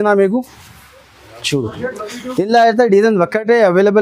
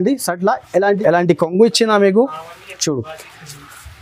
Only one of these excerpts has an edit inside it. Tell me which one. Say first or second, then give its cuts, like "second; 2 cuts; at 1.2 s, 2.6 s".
second; 1 cut; at 1.0 s